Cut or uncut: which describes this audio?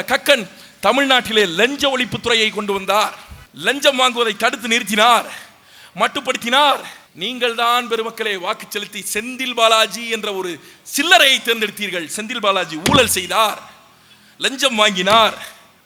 uncut